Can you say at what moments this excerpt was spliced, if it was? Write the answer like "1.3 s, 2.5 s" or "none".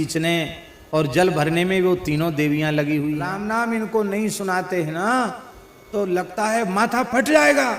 3.4 s